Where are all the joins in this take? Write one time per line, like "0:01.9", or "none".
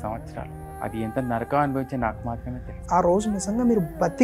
0:02.8